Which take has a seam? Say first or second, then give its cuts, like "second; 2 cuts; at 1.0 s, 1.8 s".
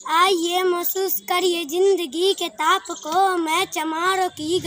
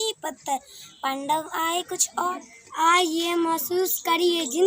second; 1 cut; at 2.3 s